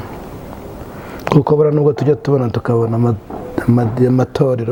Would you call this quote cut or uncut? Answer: uncut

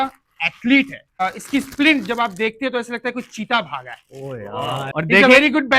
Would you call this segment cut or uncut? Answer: cut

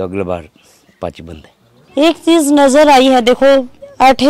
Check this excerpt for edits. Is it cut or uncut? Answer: uncut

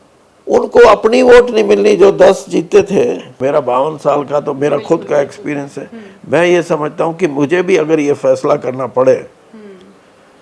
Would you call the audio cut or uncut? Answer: cut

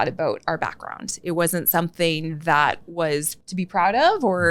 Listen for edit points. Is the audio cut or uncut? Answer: cut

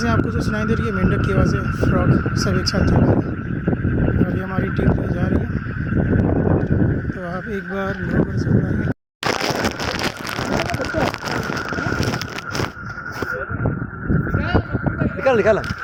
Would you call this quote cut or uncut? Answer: uncut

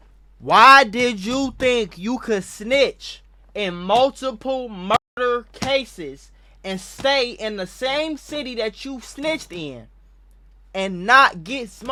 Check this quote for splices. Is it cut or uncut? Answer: uncut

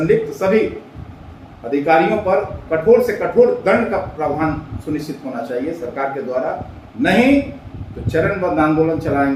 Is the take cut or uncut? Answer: uncut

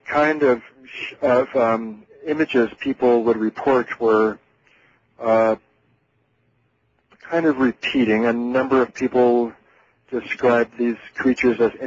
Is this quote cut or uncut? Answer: cut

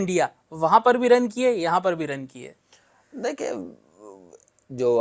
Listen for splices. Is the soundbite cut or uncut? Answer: uncut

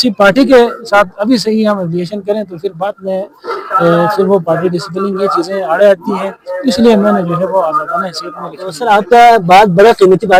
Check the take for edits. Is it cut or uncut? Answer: uncut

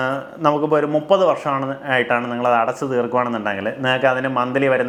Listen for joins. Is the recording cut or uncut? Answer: uncut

